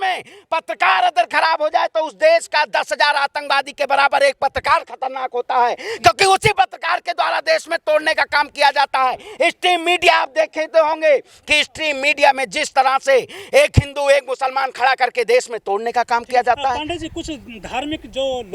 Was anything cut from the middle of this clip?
no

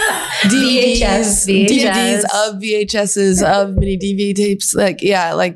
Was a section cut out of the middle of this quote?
no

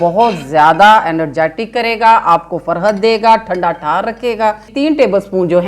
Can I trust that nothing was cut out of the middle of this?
no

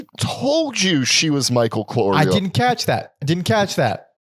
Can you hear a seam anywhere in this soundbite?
no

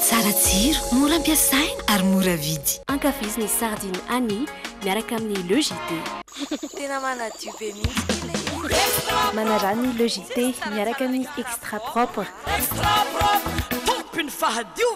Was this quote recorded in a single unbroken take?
yes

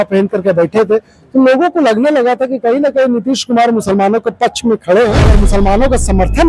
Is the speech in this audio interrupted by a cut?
yes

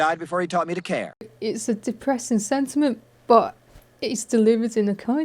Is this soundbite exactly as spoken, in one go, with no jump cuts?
no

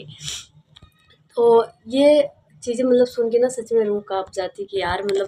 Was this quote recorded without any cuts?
yes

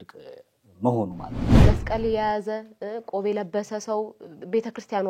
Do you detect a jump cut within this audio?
yes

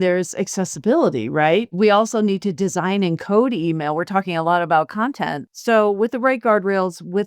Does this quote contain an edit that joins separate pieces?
yes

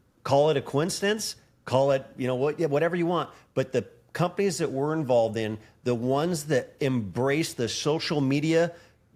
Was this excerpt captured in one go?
yes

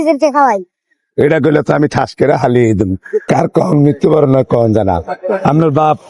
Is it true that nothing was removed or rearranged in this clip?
no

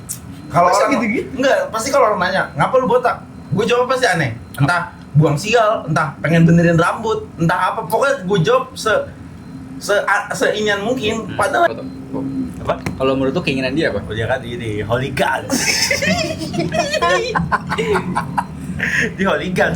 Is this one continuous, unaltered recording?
no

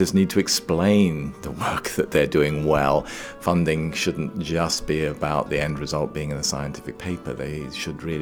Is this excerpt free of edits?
yes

